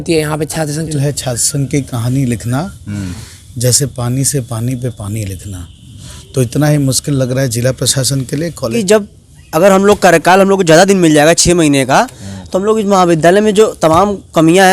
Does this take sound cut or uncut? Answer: cut